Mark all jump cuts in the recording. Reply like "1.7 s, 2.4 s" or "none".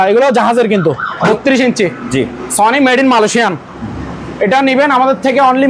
1.2 s